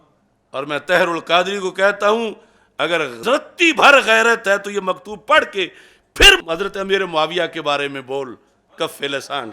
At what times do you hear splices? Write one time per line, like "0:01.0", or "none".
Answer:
0:03.1